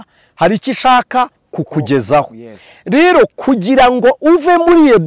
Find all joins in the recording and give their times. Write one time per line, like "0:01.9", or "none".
none